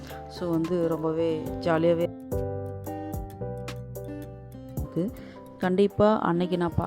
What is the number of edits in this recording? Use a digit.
2